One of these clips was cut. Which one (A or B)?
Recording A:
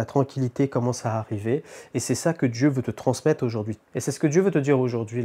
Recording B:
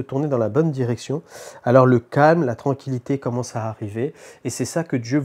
A